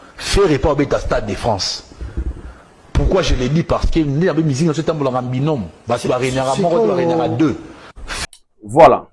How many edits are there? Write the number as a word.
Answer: zero